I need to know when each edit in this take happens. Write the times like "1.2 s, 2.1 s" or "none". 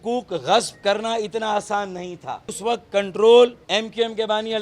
2.6 s, 3.6 s